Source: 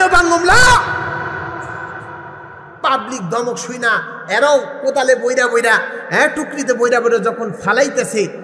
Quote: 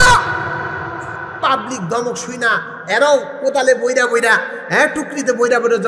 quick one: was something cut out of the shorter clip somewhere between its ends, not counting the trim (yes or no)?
yes